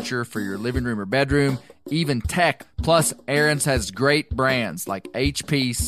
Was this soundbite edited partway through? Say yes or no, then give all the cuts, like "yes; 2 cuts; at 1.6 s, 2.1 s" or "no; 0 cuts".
yes; 1 cut; at 2.6 s